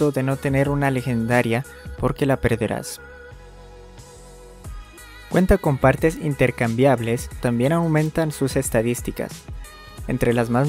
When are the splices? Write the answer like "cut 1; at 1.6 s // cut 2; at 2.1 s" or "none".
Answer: cut 1; at 2.9 s // cut 2; at 5.3 s // cut 3; at 7.4 s